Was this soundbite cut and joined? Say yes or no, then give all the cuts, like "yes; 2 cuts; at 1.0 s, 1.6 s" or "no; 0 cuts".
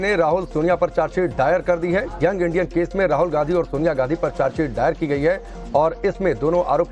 yes; 1 cut; at 3.7 s